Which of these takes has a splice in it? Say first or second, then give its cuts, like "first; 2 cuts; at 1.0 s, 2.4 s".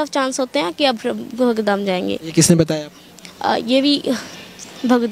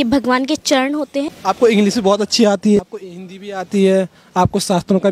second; 2 cuts; at 1.3 s, 2.8 s